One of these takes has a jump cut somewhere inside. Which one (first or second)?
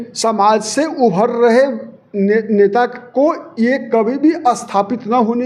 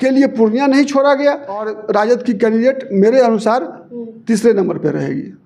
second